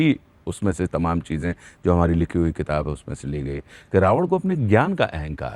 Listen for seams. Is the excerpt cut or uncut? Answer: uncut